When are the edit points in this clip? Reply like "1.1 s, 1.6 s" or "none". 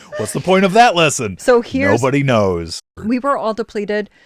2.8 s